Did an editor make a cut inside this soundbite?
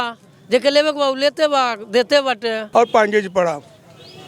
yes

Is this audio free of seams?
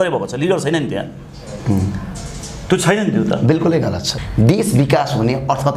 no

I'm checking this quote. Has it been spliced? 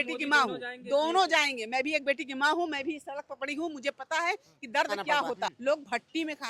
yes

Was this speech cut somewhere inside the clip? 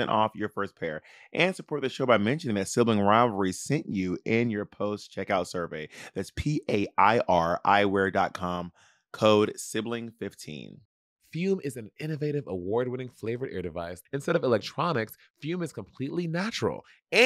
yes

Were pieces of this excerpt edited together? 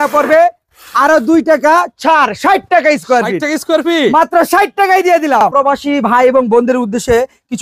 yes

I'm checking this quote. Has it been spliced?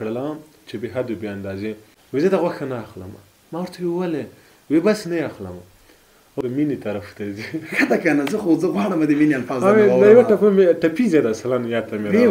yes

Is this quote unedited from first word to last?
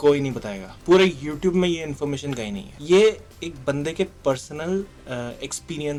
yes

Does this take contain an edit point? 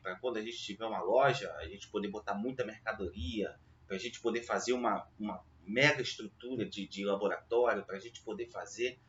no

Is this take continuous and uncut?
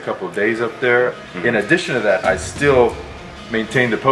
no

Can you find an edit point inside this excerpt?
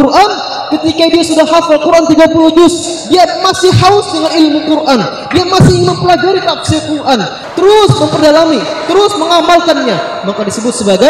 yes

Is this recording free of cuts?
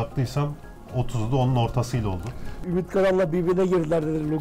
no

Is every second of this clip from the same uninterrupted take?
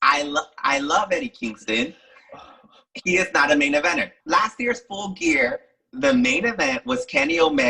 no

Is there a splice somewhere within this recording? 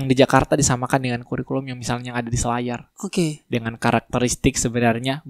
no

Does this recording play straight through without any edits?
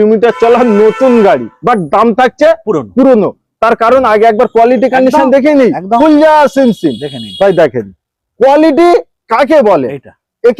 yes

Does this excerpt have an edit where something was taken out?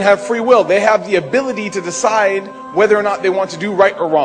no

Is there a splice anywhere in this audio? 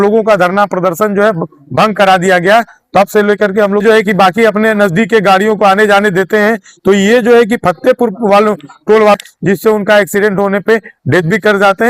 yes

